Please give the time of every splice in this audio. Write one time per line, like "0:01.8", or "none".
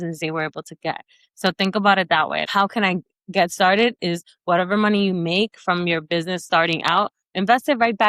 0:02.4

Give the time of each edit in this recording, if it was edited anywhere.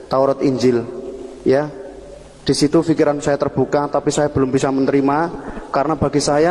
none

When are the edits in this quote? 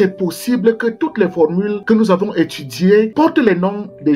0:01.8
0:03.1

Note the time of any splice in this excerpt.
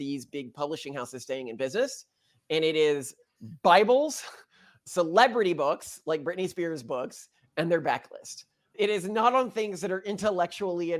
none

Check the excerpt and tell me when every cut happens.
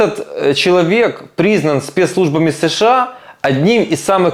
none

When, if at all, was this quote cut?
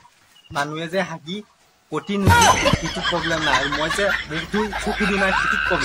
none

